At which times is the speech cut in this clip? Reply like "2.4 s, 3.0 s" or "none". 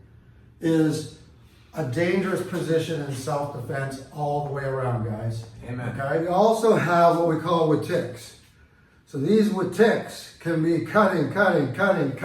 6.2 s